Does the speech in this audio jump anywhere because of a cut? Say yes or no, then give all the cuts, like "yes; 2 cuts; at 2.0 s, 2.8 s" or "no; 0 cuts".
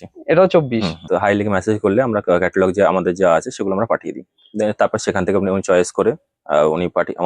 yes; 1 cut; at 1.0 s